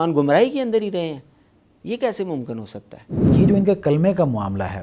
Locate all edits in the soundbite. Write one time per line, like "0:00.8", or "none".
0:03.3